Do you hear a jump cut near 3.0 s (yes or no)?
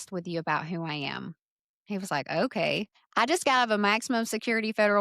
yes